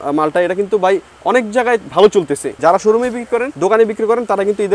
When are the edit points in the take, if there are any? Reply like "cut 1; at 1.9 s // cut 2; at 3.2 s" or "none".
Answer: cut 1; at 2.6 s // cut 2; at 3.5 s